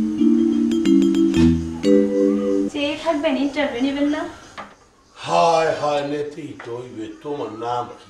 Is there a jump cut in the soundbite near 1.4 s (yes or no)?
yes